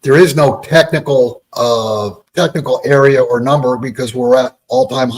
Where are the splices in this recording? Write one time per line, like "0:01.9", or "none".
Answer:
0:01.8